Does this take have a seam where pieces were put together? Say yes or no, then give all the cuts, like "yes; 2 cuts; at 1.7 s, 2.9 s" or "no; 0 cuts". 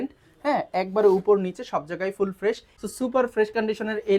yes; 1 cut; at 2.7 s